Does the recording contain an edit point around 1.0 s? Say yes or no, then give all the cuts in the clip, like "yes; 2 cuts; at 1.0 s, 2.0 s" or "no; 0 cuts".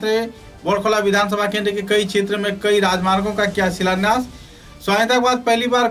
no; 0 cuts